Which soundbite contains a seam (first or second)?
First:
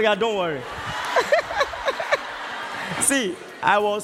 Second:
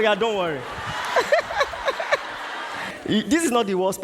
second